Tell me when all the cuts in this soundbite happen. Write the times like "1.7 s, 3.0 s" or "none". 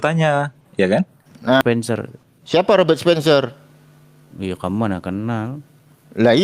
1.6 s